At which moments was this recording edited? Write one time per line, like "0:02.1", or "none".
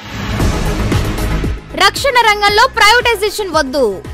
0:01.0